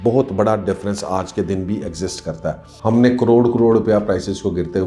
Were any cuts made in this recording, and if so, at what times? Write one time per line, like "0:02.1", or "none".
0:02.7